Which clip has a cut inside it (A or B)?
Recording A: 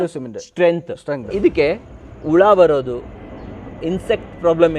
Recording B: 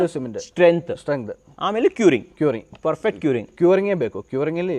A